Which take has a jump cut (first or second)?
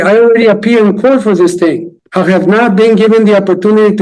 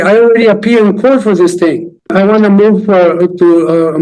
second